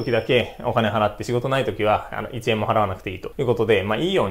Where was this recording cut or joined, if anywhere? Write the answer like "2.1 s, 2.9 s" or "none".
none